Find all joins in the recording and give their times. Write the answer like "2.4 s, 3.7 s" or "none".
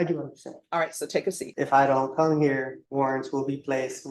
1.5 s, 2.8 s